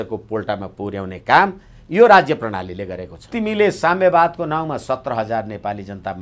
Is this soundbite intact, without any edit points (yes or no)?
no